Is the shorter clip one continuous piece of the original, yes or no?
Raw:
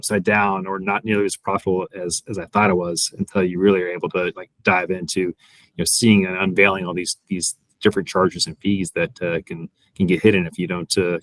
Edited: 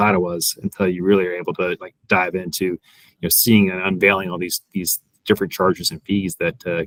yes